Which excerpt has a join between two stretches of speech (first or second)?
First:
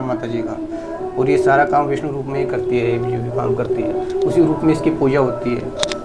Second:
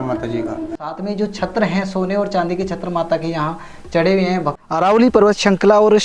second